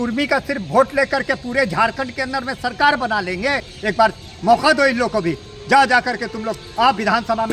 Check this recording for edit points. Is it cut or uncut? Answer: cut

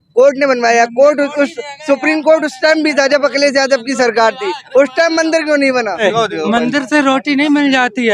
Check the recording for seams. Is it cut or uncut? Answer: cut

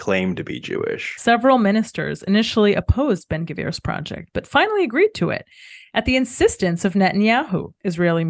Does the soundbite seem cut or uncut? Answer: uncut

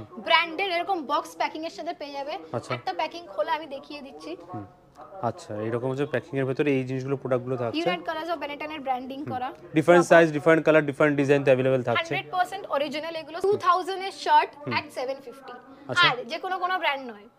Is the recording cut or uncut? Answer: cut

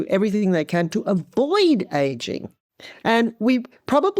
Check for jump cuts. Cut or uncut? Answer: cut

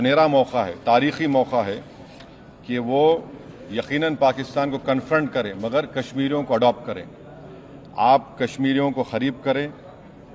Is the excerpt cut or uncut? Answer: uncut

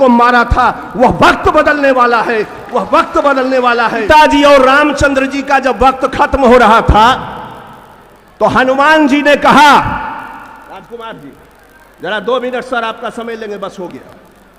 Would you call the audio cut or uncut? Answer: cut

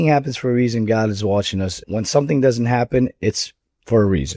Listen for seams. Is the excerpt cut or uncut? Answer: cut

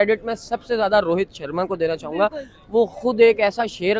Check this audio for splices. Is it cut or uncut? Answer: uncut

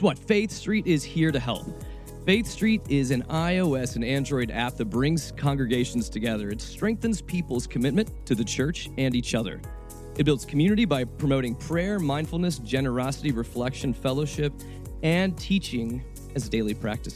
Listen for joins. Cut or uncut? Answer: uncut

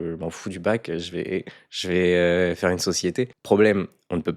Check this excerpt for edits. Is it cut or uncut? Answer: uncut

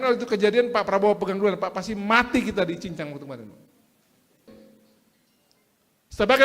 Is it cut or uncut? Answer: cut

